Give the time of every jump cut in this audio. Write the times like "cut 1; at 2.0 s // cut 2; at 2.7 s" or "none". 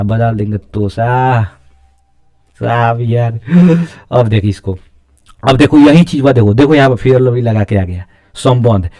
none